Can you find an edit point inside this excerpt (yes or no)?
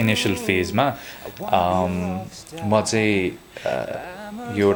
no